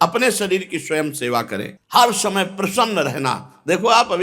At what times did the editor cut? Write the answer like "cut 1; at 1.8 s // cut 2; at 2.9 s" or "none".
cut 1; at 1.8 s